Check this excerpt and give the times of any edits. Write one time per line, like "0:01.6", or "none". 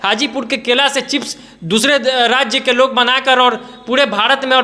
none